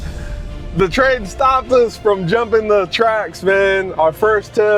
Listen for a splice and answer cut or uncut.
uncut